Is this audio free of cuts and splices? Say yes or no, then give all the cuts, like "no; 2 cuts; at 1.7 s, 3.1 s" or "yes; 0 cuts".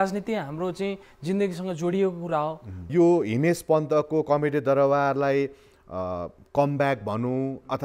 no; 1 cut; at 2.9 s